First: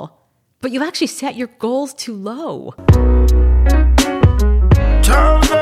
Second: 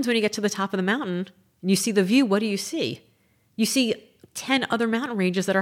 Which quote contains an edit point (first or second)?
first